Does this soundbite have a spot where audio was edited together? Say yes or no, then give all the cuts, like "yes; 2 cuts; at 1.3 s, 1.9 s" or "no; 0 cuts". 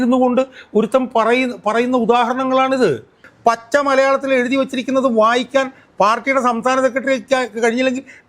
yes; 1 cut; at 3.3 s